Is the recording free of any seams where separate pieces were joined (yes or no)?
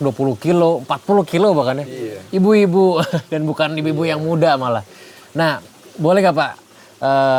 yes